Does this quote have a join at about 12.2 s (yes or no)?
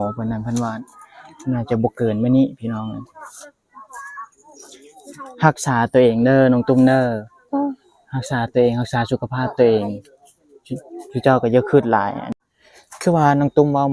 yes